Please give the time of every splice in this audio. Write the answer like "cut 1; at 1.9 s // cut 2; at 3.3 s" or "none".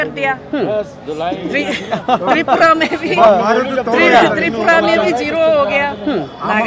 none